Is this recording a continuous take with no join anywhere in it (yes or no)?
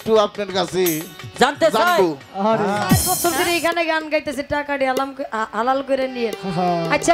no